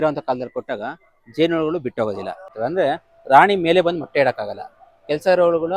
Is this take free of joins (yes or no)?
no